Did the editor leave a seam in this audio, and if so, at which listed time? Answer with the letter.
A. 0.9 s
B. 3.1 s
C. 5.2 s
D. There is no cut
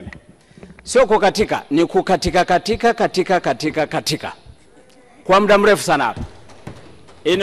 D